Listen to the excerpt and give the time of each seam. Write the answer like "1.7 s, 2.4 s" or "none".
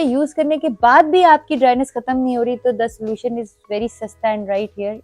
none